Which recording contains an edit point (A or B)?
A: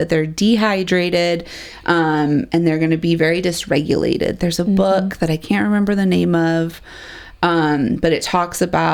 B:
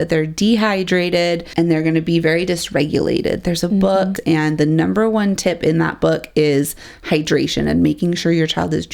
B